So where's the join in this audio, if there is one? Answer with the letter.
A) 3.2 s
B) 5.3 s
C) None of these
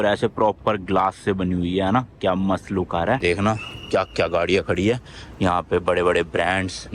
A